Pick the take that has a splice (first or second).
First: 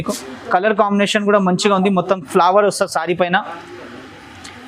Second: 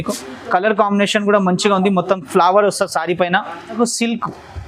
second